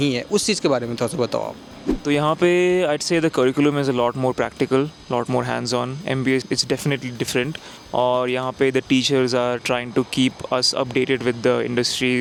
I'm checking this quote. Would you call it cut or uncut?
uncut